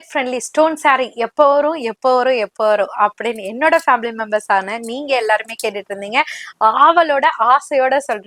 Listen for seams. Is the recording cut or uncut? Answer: uncut